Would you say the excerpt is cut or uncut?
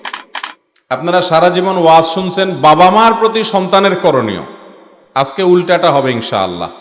uncut